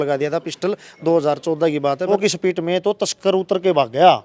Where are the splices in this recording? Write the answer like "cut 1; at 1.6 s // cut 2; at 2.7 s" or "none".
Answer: cut 1; at 2.2 s